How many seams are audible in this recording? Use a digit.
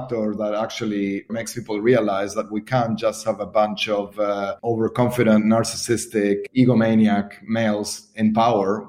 2